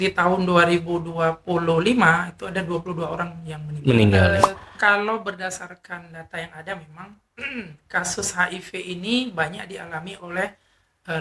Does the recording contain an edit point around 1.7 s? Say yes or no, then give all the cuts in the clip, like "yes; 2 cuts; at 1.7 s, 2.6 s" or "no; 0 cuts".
no; 1 cut; at 4.3 s